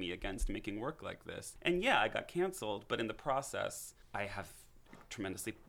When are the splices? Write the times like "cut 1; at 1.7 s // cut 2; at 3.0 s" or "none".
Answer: cut 1; at 1.4 s // cut 2; at 3.9 s